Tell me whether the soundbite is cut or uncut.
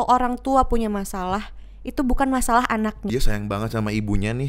cut